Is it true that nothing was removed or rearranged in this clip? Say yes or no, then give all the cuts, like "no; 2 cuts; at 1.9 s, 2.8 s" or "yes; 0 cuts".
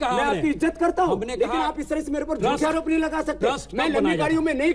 yes; 0 cuts